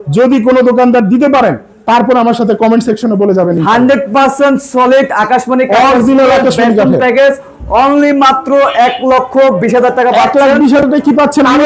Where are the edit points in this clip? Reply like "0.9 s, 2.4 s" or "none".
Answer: none